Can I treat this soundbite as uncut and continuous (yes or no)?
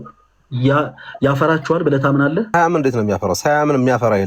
no